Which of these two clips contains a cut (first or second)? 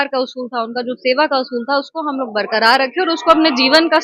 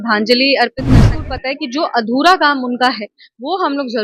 second